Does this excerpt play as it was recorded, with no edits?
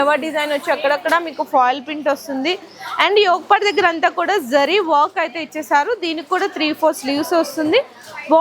yes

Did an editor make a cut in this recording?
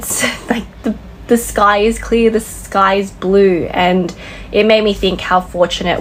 no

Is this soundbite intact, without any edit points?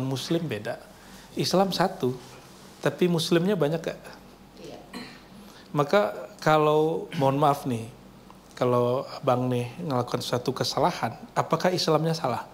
yes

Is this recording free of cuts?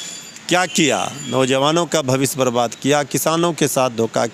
yes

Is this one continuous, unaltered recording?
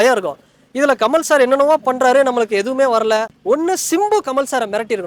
no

